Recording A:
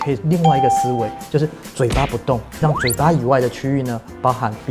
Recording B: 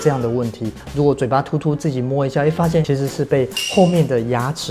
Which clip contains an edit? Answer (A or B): B